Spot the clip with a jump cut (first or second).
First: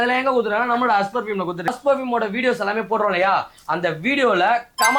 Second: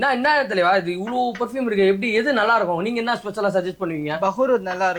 first